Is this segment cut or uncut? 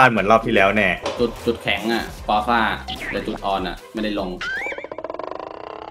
uncut